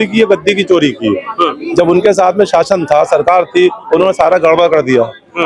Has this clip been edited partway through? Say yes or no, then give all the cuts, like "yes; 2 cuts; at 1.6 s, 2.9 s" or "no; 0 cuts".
no; 0 cuts